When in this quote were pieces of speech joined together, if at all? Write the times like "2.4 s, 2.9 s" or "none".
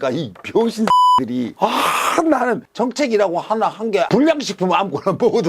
2.6 s, 4.1 s